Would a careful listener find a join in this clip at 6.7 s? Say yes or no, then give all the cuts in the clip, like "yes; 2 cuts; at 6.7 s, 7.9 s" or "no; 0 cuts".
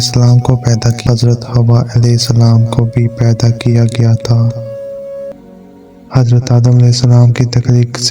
no; 2 cuts; at 1.0 s, 5.3 s